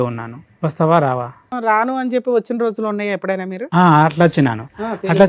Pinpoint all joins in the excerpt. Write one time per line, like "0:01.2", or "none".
0:01.5